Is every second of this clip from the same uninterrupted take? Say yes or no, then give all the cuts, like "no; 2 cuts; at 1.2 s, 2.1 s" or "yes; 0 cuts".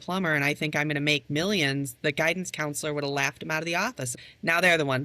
no; 1 cut; at 4.1 s